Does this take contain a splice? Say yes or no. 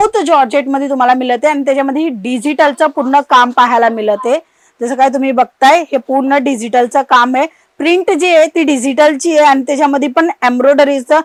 no